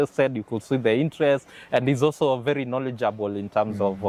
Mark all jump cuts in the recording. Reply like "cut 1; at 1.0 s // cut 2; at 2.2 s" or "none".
none